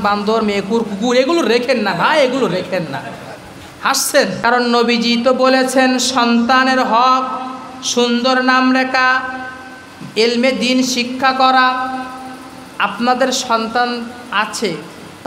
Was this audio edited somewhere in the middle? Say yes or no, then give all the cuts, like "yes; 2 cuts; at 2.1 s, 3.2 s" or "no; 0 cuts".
yes; 1 cut; at 4.4 s